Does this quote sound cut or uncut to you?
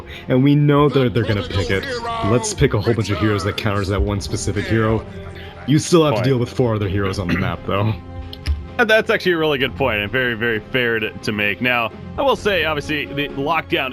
cut